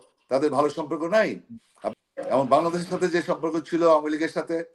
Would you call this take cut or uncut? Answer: cut